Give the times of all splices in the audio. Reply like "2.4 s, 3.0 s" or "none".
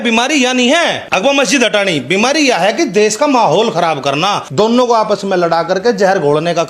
1.0 s, 4.4 s